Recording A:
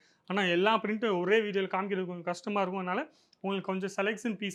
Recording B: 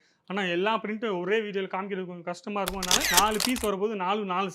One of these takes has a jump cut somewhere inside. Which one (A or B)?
B